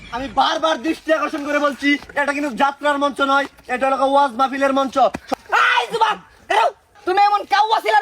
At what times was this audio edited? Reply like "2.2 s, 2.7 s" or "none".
5.3 s, 7.0 s